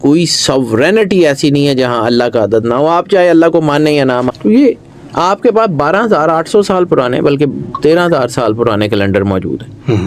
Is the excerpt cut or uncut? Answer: cut